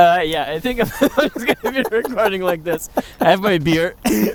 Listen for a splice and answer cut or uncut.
uncut